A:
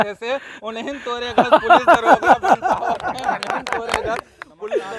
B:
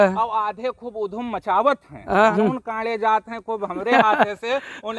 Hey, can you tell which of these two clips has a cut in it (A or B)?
B